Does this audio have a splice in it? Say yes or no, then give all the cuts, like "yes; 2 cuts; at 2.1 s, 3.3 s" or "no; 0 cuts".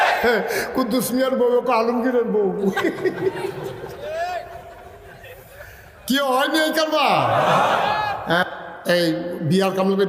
yes; 1 cut; at 8.4 s